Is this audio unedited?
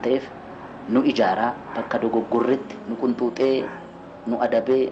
no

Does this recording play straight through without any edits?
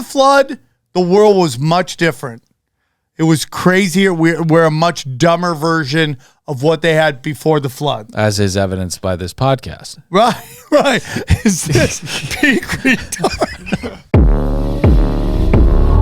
no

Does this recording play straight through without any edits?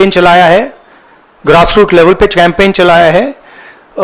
yes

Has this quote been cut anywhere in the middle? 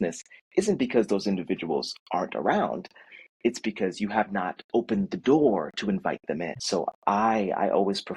yes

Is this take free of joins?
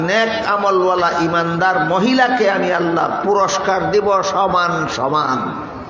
yes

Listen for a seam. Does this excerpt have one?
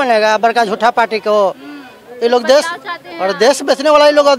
no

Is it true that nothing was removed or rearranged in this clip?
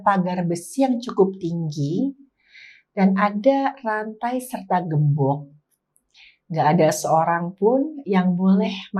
yes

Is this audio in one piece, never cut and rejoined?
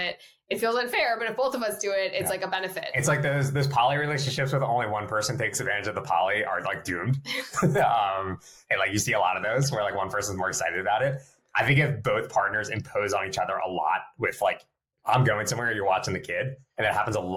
yes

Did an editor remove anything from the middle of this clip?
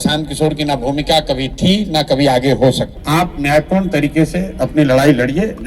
yes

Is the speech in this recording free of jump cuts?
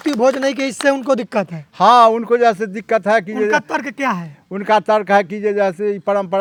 yes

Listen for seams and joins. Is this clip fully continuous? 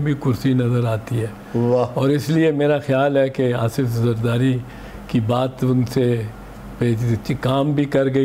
yes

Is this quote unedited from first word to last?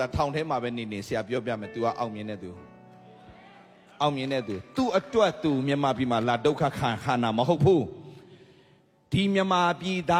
yes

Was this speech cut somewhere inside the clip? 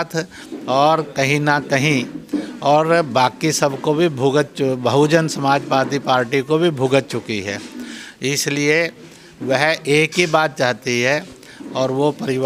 no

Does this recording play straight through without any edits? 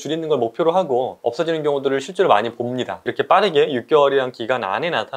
no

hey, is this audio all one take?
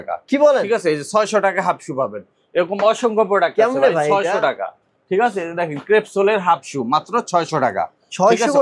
yes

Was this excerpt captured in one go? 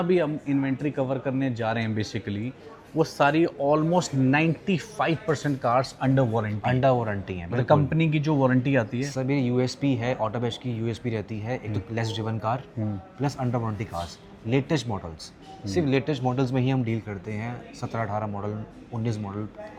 yes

